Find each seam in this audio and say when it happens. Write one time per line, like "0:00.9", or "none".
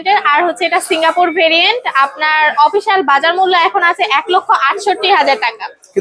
none